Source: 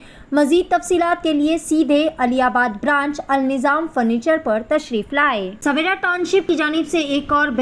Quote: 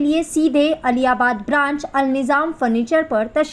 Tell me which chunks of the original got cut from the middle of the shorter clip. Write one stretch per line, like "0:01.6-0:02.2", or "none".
none